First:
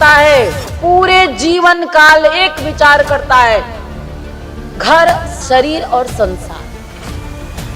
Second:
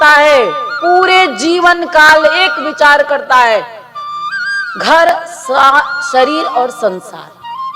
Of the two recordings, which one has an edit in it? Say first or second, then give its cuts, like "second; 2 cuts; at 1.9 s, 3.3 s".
first; 1 cut; at 5.3 s